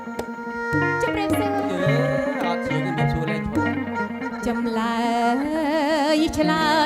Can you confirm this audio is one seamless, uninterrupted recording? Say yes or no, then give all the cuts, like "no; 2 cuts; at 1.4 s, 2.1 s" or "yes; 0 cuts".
yes; 0 cuts